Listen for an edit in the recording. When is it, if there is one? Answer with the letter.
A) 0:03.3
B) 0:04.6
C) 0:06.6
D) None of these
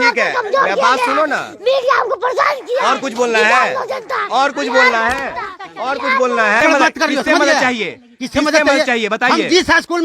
C